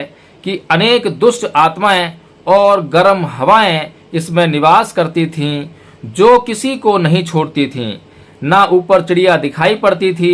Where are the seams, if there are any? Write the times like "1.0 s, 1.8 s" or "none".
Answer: none